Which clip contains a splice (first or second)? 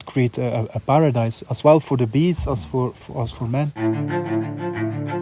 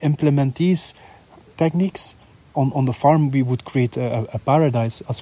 first